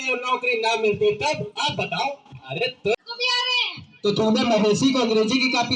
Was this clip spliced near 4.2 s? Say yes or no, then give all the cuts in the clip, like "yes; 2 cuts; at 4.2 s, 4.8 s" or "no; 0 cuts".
no; 1 cut; at 3.0 s